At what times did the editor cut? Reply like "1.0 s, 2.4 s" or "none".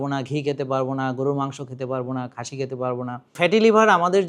3.4 s